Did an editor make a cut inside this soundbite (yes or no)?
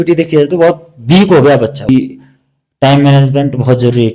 yes